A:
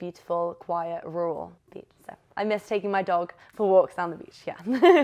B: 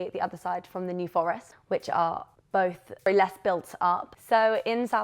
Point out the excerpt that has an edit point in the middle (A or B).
B